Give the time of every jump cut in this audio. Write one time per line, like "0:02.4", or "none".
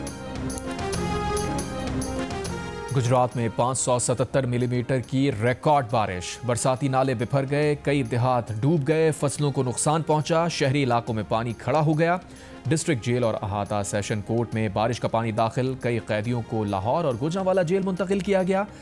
0:01.4